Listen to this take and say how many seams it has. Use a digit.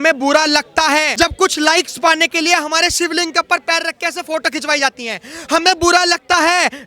1